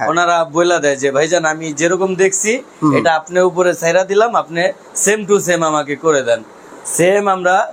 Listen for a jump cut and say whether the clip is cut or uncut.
uncut